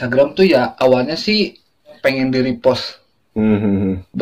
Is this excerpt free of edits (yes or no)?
no